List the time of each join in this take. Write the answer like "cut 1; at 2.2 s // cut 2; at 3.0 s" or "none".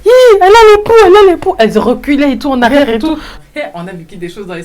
cut 1; at 3.4 s